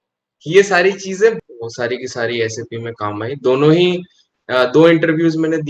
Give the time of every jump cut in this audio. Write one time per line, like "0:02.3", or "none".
0:01.4